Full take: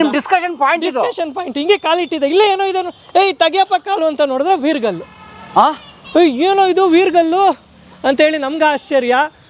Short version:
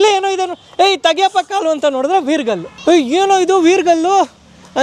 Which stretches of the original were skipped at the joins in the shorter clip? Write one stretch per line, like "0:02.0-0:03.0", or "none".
0:05.1-0:06.0